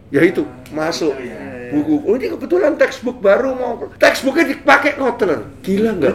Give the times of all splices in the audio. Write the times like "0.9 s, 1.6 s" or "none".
3.8 s